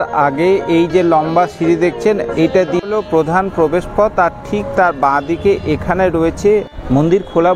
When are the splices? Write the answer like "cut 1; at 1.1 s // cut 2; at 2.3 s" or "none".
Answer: cut 1; at 2.8 s // cut 2; at 6.7 s